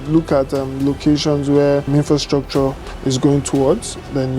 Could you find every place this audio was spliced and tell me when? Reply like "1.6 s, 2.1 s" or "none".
1.9 s